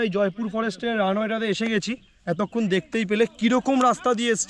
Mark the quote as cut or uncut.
uncut